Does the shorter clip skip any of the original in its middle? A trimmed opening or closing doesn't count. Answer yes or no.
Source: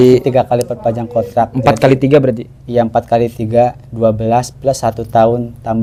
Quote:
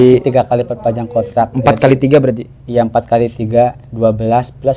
no